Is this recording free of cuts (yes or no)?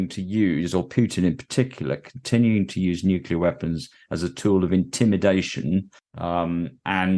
no